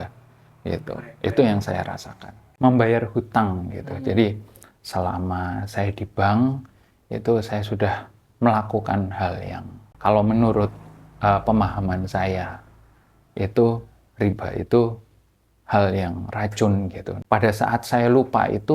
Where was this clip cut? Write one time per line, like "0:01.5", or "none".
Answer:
0:02.5
0:17.2